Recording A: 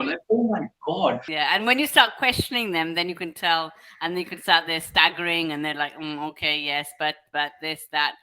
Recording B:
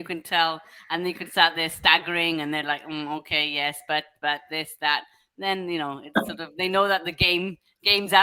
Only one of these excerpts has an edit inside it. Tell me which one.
A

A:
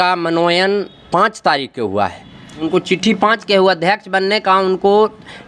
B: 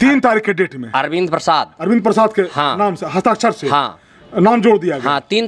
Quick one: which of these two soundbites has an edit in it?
A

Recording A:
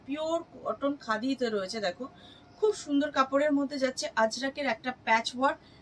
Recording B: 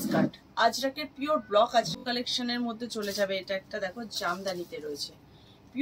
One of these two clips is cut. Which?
B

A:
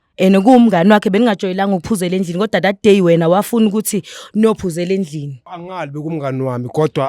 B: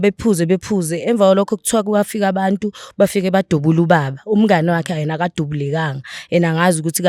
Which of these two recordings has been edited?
A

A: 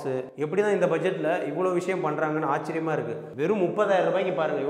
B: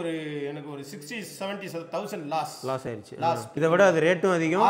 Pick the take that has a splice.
B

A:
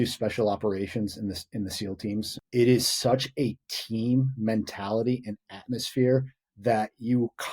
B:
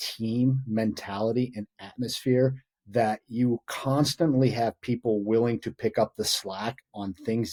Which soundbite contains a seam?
A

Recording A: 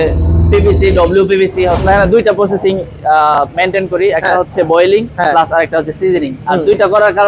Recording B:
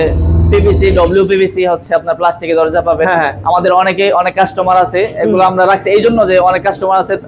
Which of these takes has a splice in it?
A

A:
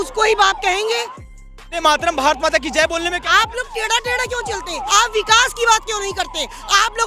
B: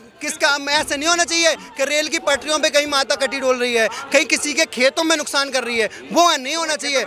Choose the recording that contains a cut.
A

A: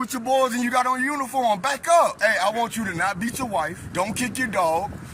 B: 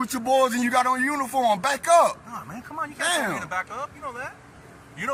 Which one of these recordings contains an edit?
A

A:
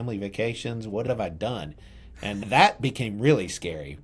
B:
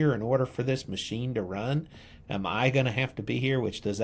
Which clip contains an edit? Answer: A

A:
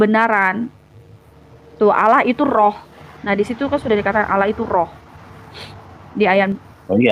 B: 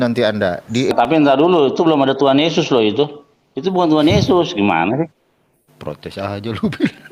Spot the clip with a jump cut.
B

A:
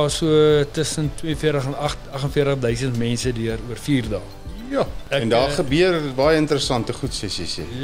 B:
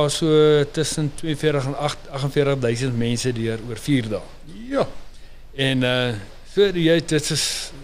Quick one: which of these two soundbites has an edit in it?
A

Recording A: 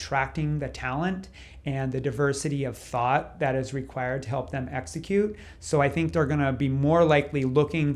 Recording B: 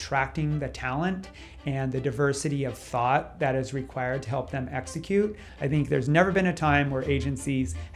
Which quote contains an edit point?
B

